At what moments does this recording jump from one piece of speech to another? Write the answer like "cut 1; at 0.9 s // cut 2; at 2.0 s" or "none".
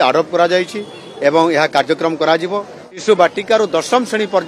cut 1; at 3.0 s